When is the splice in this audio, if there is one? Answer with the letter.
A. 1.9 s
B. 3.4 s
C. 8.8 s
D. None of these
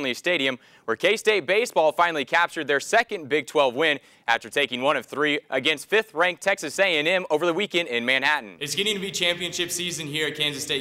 C